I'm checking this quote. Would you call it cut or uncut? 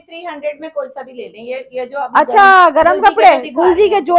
uncut